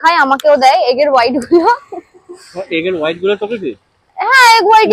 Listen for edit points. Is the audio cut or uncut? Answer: uncut